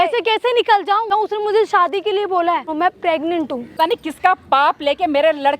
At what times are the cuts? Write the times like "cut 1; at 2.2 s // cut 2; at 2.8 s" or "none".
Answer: cut 1; at 1.1 s // cut 2; at 2.7 s // cut 3; at 3.7 s